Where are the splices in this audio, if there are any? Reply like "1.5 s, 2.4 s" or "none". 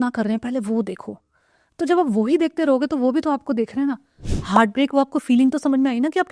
4.3 s